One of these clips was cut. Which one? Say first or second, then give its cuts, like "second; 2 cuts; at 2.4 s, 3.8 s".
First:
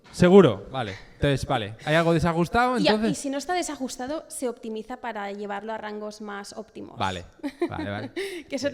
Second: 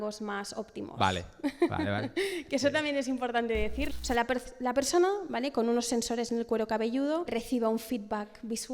second; 2 cuts; at 3.9 s, 7.3 s